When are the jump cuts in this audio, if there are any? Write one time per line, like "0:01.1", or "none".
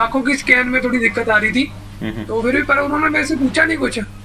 none